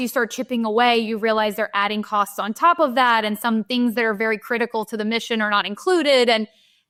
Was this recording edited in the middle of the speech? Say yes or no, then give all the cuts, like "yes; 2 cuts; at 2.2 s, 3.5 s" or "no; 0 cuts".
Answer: no; 0 cuts